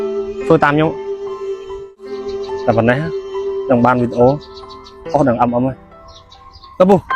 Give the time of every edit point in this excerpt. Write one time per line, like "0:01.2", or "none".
0:02.0